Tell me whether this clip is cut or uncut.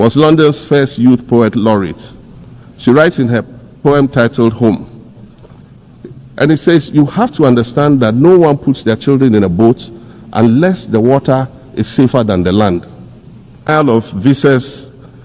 cut